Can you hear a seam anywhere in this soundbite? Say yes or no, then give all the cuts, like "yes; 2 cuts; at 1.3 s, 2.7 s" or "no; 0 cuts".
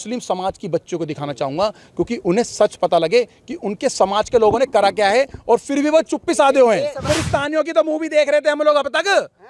yes; 1 cut; at 7.1 s